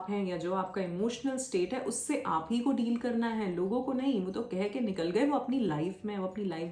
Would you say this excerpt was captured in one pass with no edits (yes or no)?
yes